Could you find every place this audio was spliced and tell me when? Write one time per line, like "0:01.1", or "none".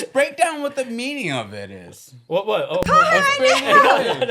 none